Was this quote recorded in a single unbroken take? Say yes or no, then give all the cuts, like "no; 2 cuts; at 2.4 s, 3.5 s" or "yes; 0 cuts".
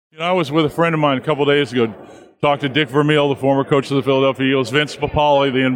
yes; 0 cuts